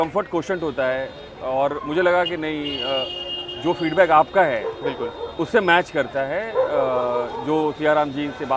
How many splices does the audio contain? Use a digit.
0